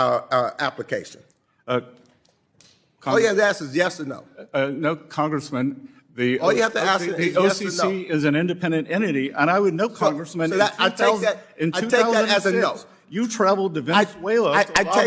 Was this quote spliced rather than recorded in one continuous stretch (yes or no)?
no